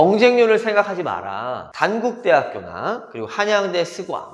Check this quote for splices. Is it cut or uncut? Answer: cut